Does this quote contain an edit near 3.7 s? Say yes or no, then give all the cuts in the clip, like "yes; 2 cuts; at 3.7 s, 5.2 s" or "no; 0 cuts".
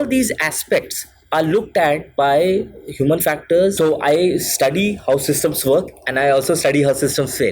yes; 1 cut; at 3.7 s